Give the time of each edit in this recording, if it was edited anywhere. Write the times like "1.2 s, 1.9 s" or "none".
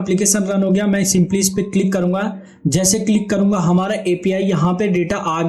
none